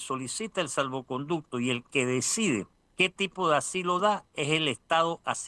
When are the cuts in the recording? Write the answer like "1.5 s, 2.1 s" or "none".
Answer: 2.8 s

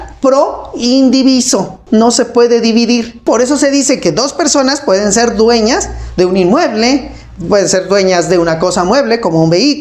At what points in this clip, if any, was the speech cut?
1.8 s, 3.2 s

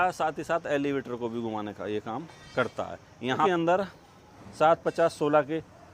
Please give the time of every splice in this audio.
3.4 s

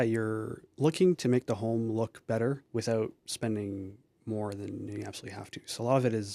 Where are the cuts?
2.6 s, 3.2 s

